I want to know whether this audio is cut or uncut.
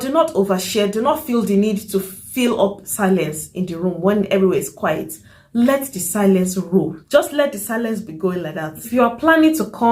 cut